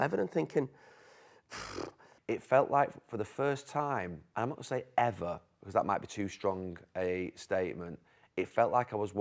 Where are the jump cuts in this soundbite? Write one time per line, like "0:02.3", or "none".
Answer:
0:02.1
0:04.2